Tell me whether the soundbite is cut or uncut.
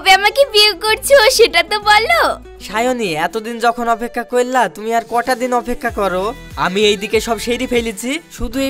uncut